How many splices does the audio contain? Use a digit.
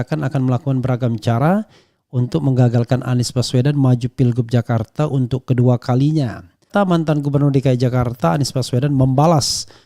1